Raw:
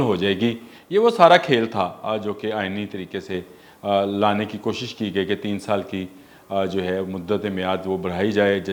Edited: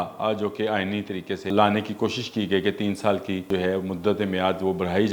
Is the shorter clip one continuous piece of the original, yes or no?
no